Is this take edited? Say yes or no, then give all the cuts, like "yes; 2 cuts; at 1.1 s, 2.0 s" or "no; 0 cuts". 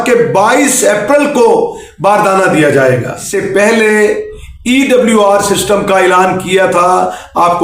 yes; 1 cut; at 3.3 s